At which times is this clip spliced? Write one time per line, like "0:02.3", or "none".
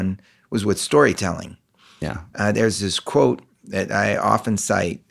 none